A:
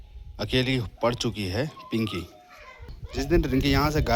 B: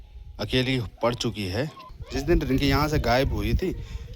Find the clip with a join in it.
B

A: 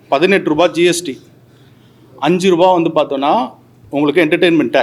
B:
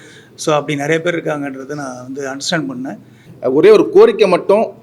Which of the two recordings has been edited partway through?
B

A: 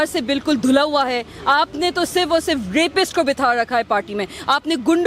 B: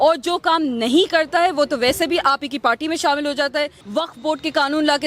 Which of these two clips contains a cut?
B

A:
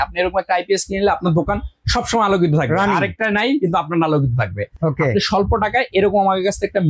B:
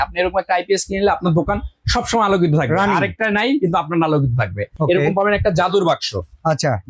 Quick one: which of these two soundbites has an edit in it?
B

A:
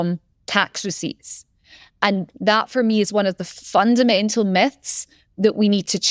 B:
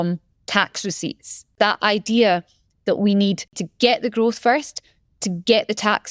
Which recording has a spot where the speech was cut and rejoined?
B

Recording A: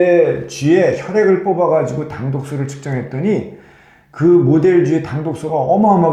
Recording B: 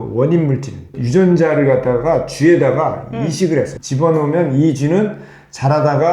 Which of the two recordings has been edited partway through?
B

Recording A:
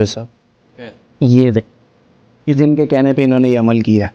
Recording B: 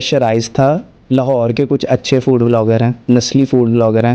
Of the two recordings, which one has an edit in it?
B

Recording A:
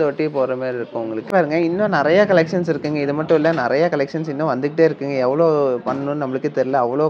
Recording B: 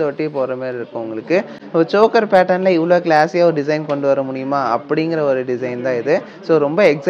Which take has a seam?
A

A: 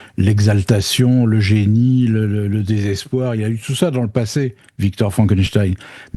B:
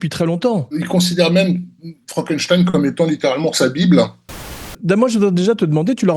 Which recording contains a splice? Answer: B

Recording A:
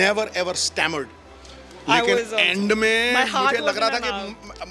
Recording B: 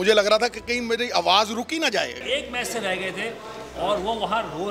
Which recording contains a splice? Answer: B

